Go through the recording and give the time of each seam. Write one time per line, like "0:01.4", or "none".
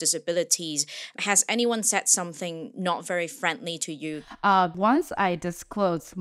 0:04.7